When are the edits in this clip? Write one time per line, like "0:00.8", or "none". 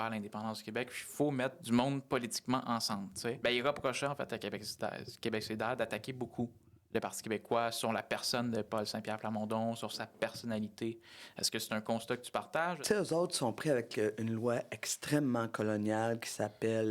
0:01.6
0:03.4
0:12.8